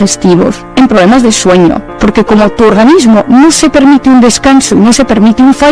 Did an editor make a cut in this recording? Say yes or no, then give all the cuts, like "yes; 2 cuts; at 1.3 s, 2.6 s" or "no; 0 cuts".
yes; 1 cut; at 1.9 s